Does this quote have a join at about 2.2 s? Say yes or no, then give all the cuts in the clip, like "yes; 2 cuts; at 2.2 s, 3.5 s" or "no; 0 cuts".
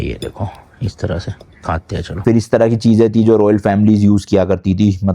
yes; 1 cut; at 2.2 s